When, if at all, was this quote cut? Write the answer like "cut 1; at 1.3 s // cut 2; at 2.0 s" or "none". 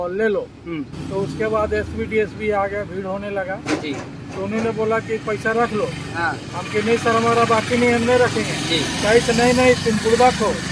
cut 1; at 1.0 s